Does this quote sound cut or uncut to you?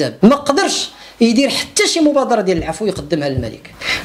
uncut